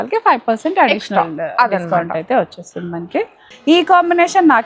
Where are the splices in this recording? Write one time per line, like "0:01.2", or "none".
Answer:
0:03.5